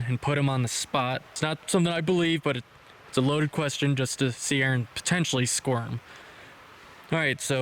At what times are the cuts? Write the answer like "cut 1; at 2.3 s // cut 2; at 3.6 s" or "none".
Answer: cut 1; at 1.3 s